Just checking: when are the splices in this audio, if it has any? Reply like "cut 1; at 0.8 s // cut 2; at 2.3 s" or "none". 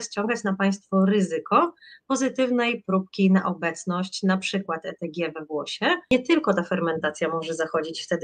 cut 1; at 6.1 s